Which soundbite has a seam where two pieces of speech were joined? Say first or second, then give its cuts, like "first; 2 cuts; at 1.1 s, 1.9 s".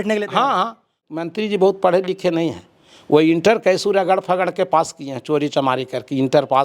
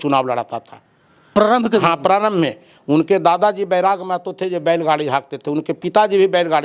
first; 1 cut; at 1.0 s